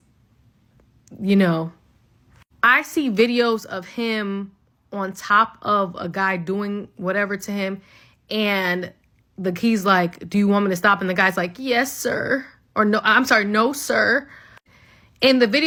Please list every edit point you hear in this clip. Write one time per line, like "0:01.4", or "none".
none